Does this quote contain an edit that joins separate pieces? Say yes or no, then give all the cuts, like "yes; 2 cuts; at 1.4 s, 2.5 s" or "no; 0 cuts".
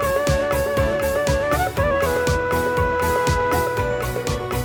no; 0 cuts